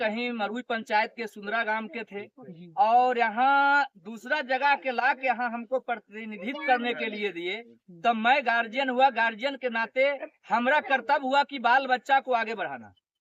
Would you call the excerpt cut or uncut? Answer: uncut